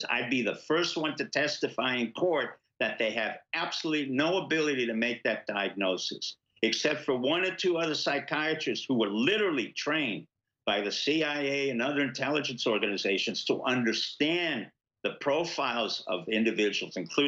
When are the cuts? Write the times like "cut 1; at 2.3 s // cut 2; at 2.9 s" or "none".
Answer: none